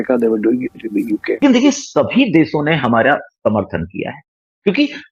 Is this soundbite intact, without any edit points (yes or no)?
no